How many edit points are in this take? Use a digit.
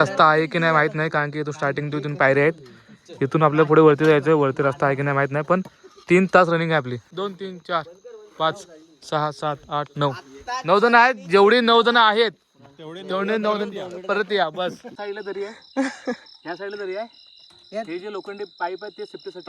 2